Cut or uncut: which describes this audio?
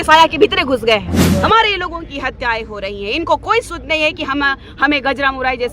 cut